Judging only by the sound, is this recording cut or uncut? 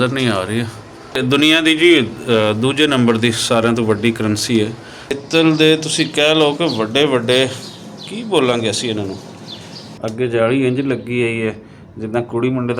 cut